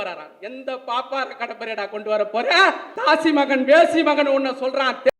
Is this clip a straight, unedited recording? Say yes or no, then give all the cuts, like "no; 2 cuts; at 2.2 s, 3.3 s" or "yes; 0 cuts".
no; 1 cut; at 2.9 s